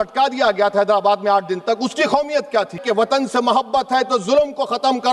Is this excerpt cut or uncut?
cut